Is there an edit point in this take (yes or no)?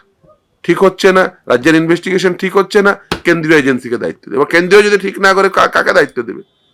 no